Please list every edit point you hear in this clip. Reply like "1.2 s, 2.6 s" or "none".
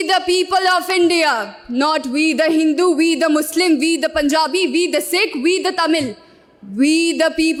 none